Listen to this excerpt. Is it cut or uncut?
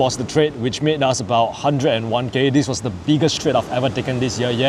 uncut